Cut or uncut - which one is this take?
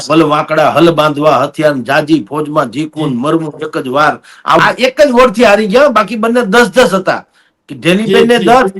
cut